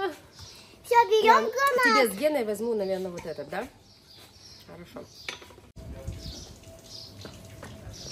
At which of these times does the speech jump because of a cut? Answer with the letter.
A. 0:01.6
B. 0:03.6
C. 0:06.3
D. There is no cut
D